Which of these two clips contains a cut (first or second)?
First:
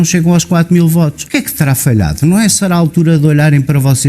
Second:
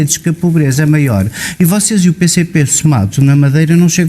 first